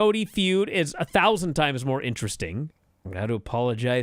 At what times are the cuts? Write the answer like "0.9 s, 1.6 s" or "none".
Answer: 2.8 s